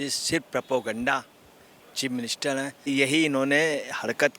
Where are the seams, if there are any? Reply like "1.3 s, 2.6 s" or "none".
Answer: 2.9 s